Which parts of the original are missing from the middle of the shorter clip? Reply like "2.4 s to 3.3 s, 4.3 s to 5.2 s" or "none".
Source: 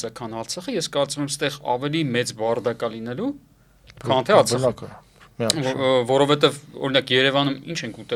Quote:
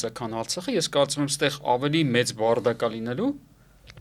none